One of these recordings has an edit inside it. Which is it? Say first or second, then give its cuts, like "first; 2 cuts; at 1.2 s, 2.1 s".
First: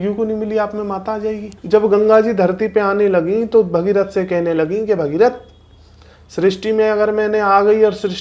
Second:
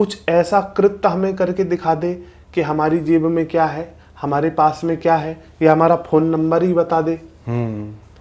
first; 1 cut; at 1.5 s